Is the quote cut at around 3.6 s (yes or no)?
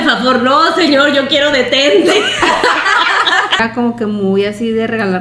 yes